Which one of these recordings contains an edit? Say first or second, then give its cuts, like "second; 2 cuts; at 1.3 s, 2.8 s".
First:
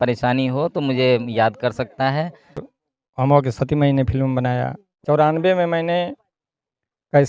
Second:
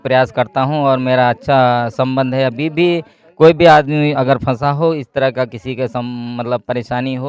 first; 2 cuts; at 2.6 s, 4.9 s